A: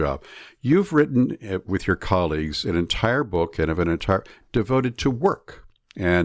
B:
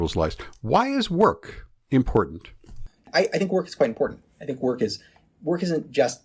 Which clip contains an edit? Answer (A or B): B